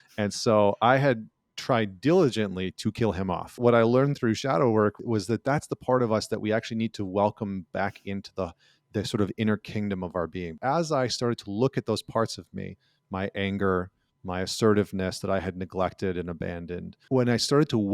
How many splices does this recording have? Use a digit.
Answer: 4